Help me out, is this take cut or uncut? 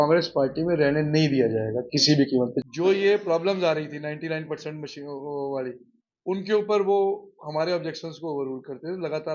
cut